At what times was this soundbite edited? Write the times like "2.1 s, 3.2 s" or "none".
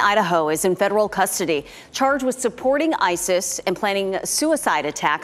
none